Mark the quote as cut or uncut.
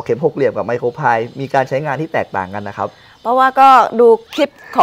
uncut